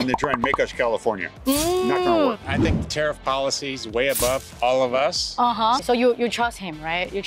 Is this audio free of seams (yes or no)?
no